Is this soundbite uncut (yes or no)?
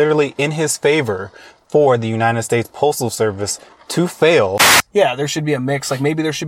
no